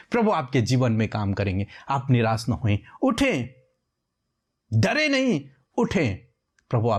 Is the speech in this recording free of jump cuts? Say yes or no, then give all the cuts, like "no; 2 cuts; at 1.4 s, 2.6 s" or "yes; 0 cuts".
yes; 0 cuts